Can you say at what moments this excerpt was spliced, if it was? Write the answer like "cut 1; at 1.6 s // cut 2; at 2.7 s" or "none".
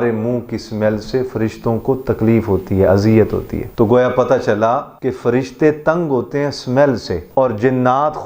cut 1; at 3.6 s // cut 2; at 4.9 s // cut 3; at 7.2 s